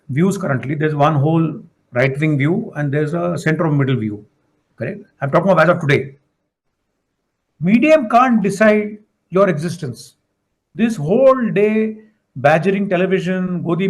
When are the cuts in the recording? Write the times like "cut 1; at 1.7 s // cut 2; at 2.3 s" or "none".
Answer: cut 1; at 6.4 s